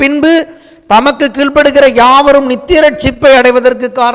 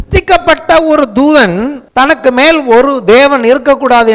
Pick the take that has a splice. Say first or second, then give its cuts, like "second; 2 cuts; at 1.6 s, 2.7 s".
second; 1 cut; at 1.8 s